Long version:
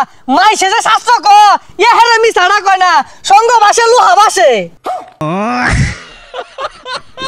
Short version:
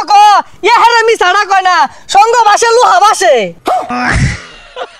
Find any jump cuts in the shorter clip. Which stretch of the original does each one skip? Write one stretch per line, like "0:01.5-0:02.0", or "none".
0:05.1-0:05.5